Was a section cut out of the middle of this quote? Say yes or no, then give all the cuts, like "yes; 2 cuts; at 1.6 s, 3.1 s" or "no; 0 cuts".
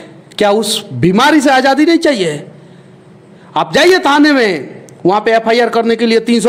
no; 0 cuts